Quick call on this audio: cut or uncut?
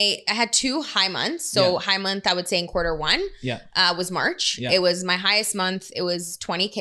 uncut